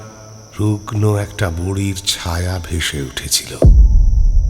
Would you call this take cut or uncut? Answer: cut